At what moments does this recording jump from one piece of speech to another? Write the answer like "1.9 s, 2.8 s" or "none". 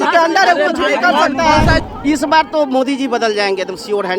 1.8 s